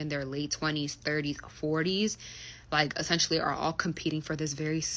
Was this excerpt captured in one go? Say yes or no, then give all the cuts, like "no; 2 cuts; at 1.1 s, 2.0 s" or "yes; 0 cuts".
no; 1 cut; at 1.0 s